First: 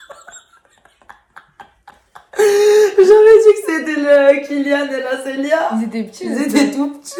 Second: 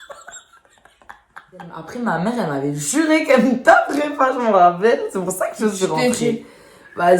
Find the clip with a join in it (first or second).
second